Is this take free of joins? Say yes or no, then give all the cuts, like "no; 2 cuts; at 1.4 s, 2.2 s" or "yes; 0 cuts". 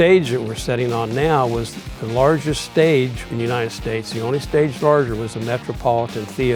no; 1 cut; at 3.2 s